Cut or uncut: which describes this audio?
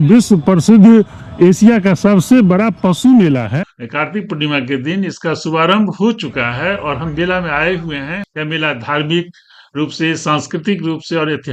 cut